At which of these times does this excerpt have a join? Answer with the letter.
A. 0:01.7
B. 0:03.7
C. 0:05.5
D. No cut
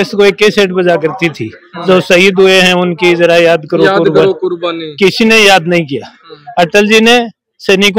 D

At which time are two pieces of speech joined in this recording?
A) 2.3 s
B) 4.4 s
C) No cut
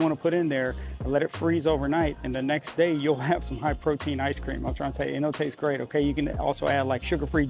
C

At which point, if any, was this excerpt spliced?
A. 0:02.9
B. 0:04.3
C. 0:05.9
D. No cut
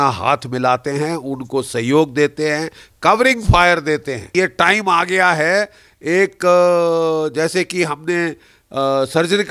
B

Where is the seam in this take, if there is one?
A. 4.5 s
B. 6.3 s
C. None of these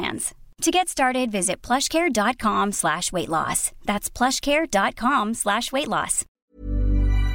B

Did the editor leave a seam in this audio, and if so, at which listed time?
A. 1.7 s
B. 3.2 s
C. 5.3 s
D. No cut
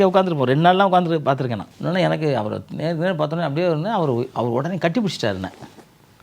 A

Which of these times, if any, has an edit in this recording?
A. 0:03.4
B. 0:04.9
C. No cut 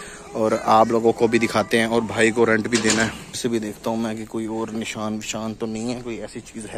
A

